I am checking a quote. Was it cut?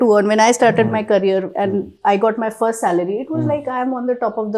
no; 0 cuts

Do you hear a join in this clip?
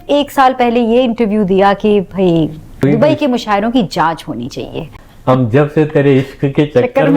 yes; 2 cuts; at 2.8 s, 4.9 s

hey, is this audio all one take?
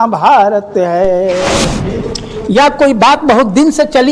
no; 1 cut; at 1.8 s

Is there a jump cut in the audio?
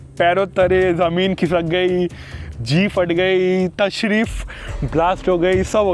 no; 0 cuts

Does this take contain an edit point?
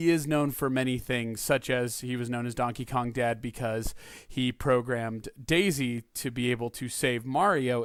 no; 0 cuts

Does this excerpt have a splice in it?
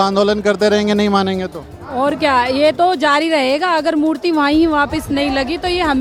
no; 0 cuts

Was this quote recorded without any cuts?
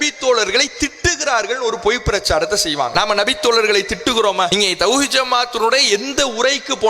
no; 2 cuts; at 2.9 s, 4.5 s

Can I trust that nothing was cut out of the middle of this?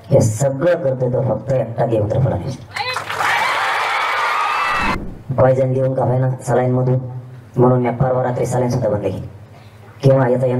no; 1 cut; at 4.9 s

